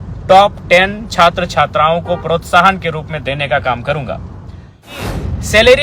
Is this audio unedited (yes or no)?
no